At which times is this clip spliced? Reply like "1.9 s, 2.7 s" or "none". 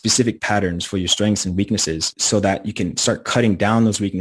2.1 s